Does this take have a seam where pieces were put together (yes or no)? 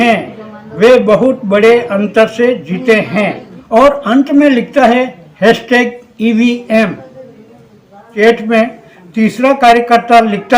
no